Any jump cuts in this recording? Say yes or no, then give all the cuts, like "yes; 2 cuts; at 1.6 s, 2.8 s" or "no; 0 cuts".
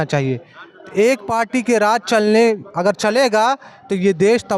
no; 0 cuts